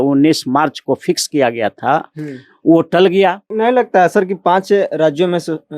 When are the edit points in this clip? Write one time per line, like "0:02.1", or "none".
0:03.5